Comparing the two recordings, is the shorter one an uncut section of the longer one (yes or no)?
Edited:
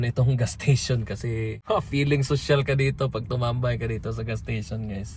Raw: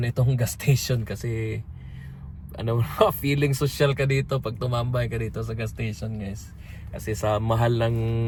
no